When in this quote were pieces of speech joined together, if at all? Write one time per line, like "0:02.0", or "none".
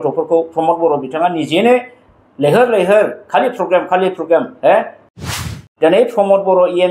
0:05.4